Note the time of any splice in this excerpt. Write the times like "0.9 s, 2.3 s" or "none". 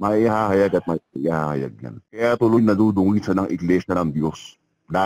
2.2 s